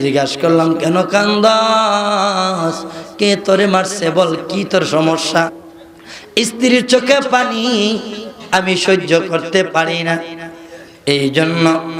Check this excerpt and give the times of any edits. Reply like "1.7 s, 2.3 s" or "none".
5.6 s